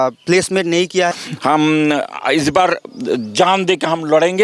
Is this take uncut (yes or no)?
no